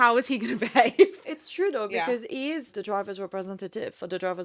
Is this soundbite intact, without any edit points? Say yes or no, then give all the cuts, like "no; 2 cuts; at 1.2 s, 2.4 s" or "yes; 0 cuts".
no; 2 cuts; at 1.3 s, 2.7 s